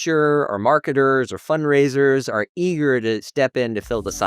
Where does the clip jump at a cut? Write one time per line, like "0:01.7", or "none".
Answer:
0:03.3